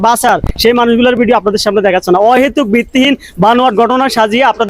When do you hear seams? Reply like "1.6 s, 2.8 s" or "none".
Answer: none